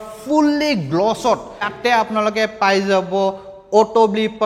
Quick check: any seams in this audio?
yes; 1 cut; at 1.7 s

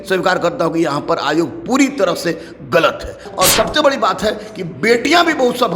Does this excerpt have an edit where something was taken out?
yes; 1 cut; at 3.2 s

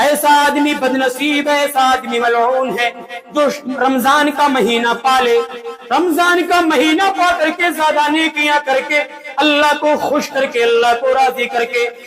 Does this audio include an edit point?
no; 0 cuts

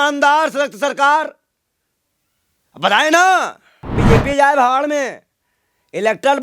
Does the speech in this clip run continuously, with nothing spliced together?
no; 1 cut; at 4.0 s

